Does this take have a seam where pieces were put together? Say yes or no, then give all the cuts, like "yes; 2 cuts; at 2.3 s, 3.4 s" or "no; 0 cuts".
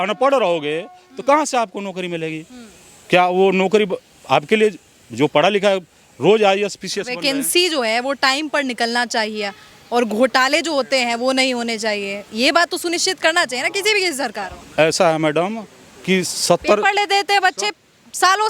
no; 0 cuts